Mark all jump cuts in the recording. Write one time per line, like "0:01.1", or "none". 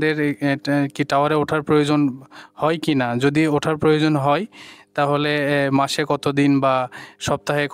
none